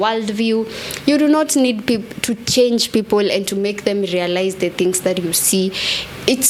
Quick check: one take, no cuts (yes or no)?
yes